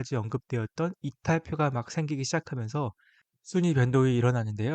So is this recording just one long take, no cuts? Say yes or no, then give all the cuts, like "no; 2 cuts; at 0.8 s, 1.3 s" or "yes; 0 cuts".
yes; 0 cuts